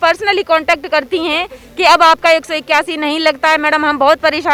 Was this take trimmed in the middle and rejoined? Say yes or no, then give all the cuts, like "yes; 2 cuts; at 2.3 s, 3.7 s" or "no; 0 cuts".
no; 0 cuts